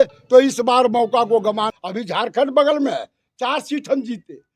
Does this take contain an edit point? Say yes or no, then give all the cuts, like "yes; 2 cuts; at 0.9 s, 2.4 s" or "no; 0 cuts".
yes; 1 cut; at 1.7 s